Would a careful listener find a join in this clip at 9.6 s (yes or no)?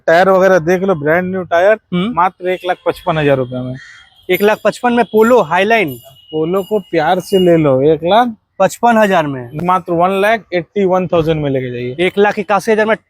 yes